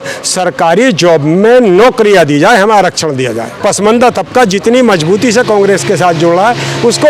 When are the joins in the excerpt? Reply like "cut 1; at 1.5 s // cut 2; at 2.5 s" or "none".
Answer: cut 1; at 3.6 s